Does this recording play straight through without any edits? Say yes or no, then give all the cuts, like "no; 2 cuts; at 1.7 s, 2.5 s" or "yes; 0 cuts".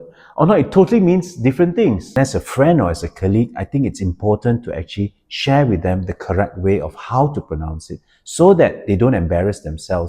no; 1 cut; at 2.1 s